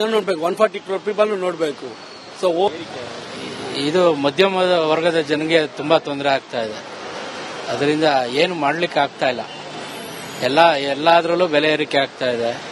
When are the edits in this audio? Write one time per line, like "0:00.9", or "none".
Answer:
0:02.7